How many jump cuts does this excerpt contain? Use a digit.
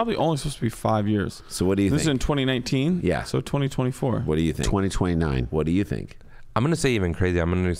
0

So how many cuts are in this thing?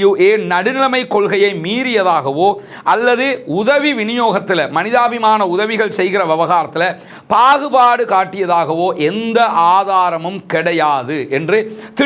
0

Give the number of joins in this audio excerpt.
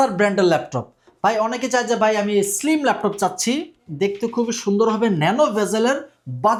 0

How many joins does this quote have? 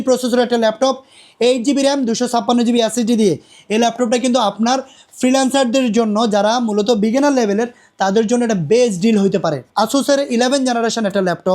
1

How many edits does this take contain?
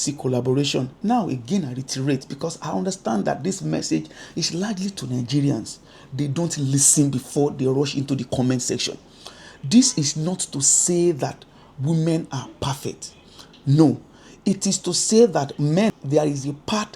2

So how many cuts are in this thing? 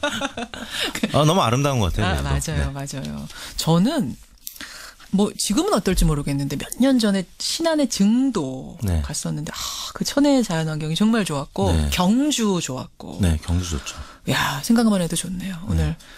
1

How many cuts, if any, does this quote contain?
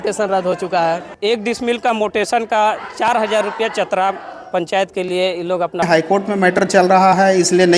2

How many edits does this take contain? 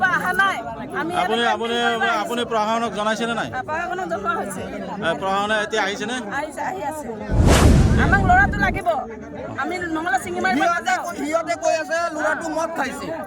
2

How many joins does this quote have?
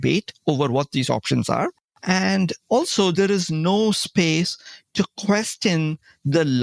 0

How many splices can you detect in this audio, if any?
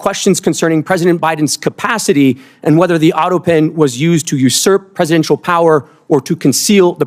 0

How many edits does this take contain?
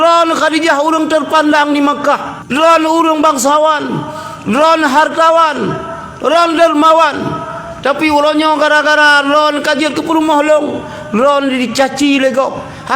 1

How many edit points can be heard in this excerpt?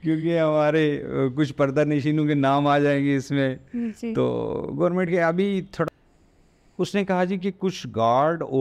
1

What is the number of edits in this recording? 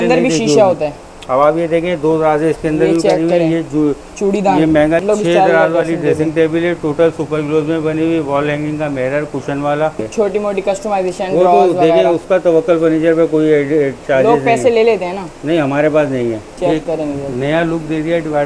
3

